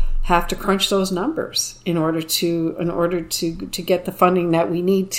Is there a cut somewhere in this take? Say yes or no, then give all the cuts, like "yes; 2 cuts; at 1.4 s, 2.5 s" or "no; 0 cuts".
no; 0 cuts